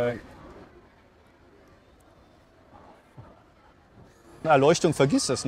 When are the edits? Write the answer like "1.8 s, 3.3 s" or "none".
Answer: 4.4 s